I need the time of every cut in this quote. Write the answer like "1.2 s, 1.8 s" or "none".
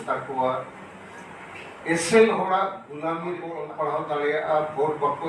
3.2 s